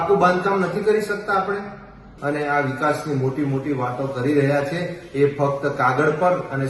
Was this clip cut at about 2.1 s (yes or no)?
yes